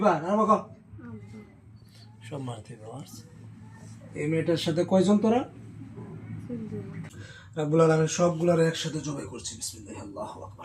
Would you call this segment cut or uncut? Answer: cut